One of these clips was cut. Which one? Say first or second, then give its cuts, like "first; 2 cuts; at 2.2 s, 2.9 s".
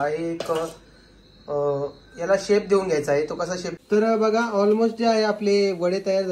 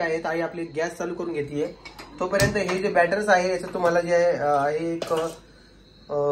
first; 1 cut; at 3.6 s